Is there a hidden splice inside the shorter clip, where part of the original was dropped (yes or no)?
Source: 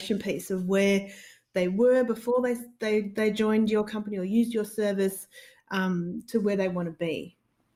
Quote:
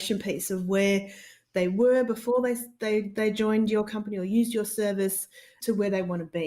yes